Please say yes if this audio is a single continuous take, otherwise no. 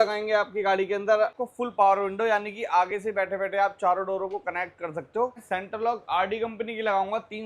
no